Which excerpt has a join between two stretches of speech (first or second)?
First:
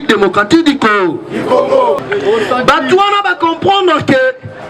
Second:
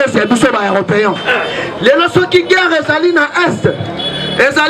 first